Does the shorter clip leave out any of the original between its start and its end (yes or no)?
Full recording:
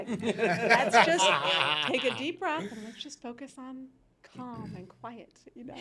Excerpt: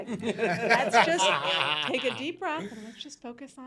no